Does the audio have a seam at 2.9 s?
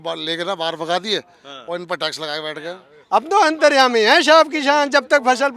yes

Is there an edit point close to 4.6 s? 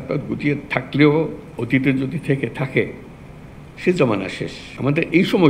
yes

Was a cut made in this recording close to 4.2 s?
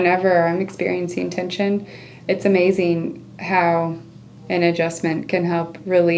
no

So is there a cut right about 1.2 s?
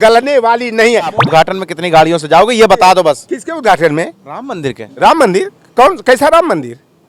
yes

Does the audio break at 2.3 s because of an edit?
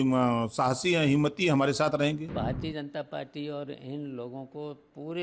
yes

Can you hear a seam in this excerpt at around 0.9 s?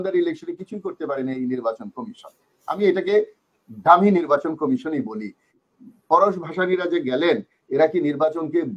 no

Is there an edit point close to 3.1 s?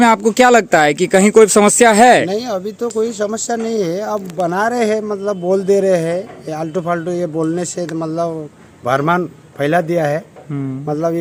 no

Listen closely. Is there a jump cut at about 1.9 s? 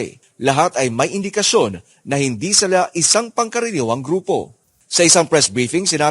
no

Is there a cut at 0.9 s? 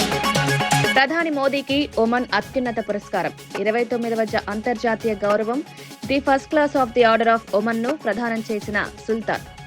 yes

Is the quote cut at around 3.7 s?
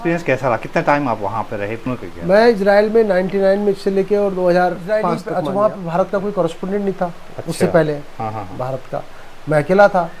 no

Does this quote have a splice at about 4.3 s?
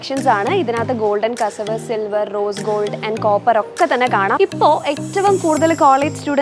yes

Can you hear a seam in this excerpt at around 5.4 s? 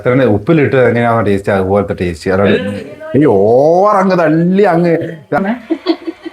yes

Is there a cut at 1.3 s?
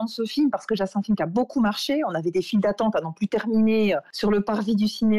no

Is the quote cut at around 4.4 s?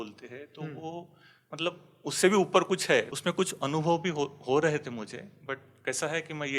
no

